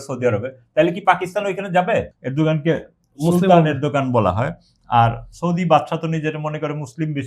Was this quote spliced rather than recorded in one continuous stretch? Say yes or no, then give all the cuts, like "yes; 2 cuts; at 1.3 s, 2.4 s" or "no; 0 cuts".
yes; 1 cut; at 2.2 s